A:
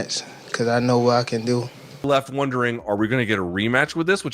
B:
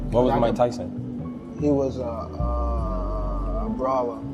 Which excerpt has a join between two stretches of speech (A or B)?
A